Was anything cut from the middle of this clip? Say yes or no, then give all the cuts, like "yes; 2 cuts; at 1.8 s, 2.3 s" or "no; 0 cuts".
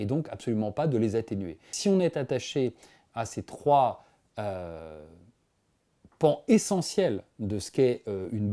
yes; 1 cut; at 1.7 s